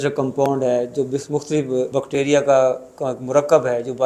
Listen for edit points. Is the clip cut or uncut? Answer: cut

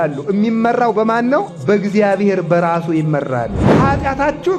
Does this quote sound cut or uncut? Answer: cut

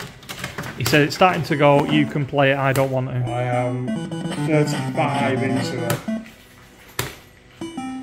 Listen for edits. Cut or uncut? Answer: uncut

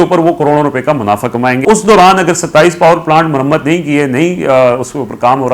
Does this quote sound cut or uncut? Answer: cut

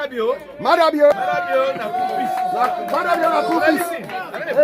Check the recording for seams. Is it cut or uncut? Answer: cut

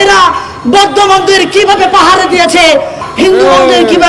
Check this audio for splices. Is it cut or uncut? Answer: cut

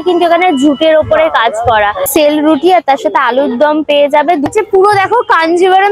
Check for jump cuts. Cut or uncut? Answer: cut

